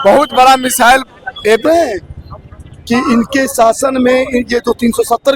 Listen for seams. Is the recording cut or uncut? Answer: cut